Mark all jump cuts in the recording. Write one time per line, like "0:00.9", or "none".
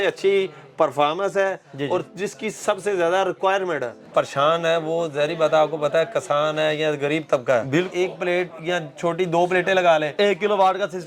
0:03.9
0:07.9